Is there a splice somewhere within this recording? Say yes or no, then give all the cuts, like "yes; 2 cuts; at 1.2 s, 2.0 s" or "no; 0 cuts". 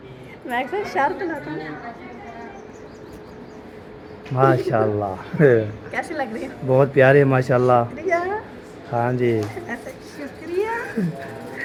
no; 0 cuts